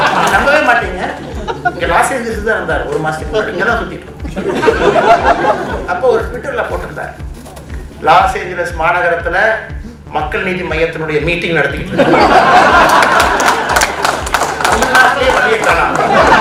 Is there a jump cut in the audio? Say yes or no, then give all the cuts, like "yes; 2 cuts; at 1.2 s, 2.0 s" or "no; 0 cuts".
no; 0 cuts